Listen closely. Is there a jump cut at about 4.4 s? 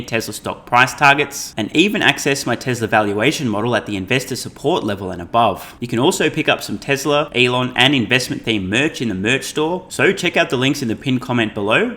no; 3 cuts; at 5.7 s, 7.3 s, 9.9 s

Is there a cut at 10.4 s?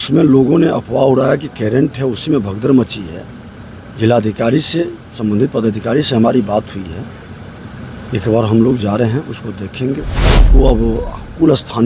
yes; 1 cut; at 10.4 s

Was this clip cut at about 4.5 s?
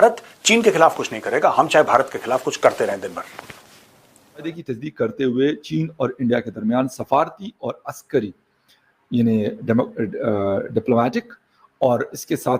yes; 1 cut; at 4.5 s

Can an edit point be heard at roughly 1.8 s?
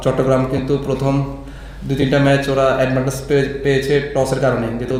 no; 0 cuts

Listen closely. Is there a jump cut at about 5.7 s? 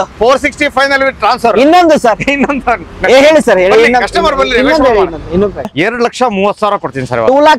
yes; 1 cut; at 5.7 s

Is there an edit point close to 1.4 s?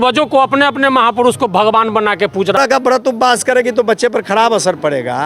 no; 1 cut; at 2.7 s

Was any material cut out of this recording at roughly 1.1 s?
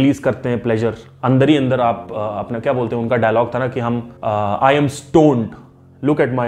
yes; 2 cuts; at 1.1 s, 4.1 s

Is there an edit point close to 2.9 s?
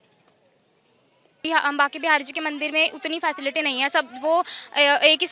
no; 1 cut; at 1.4 s

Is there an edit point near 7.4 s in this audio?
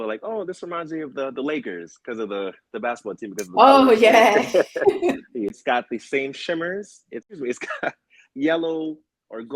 yes; 2 cuts; at 5.6 s, 7.4 s

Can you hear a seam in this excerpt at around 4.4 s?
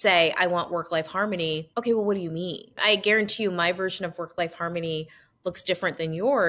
no; 2 cuts; at 1.7 s, 2.8 s

